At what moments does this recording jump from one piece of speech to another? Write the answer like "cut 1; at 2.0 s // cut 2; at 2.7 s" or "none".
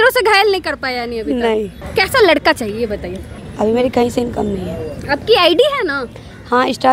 cut 1; at 1.8 s // cut 2; at 3.4 s